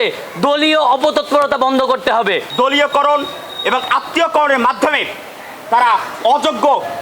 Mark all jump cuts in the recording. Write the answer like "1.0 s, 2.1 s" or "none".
2.5 s